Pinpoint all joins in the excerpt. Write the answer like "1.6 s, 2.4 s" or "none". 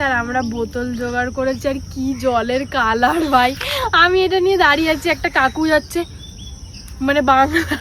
none

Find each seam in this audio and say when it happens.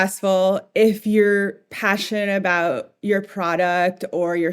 none

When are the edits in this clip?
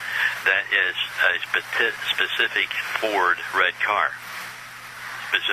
none

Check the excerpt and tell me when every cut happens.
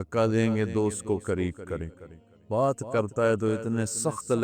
2.4 s

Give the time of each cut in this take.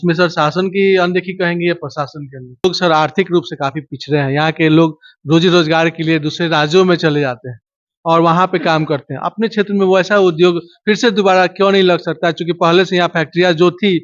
2.6 s

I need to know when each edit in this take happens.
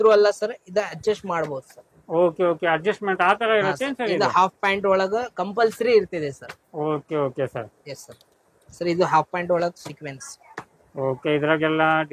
none

